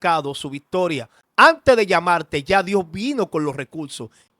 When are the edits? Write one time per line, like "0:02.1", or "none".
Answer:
0:01.2